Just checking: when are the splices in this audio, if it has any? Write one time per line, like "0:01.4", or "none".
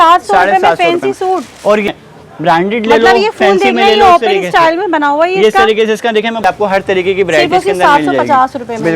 0:01.9
0:06.4